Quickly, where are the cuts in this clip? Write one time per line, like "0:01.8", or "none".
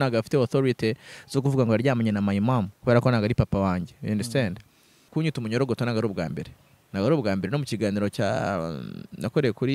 0:05.1